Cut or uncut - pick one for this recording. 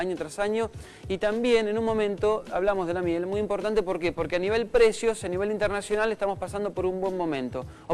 cut